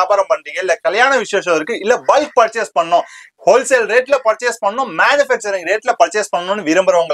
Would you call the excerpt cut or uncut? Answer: uncut